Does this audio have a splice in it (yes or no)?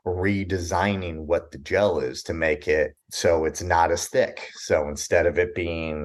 no